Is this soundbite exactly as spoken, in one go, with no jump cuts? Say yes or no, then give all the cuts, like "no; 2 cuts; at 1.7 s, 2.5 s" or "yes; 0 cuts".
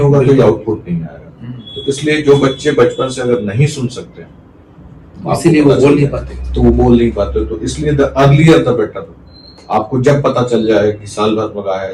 yes; 0 cuts